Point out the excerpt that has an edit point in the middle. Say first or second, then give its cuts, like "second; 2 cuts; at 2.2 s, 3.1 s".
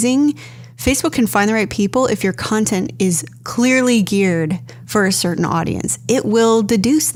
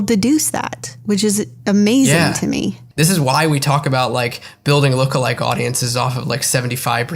second; 1 cut; at 2.8 s